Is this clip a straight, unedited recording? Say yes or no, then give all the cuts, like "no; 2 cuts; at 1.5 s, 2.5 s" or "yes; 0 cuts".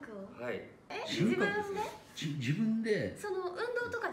no; 1 cut; at 0.9 s